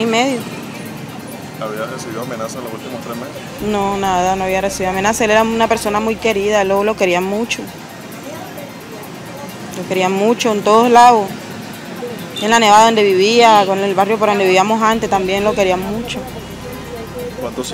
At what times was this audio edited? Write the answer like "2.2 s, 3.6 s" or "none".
1.1 s